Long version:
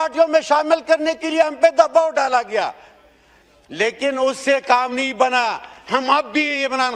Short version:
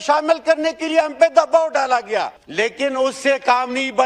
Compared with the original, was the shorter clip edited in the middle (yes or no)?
yes